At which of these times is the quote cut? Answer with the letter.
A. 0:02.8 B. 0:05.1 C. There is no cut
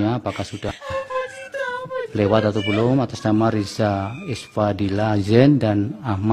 A